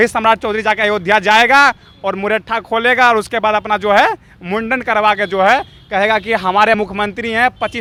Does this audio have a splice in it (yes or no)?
no